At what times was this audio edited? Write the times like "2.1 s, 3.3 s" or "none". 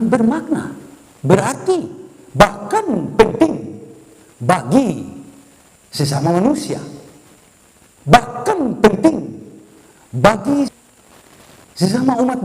10.7 s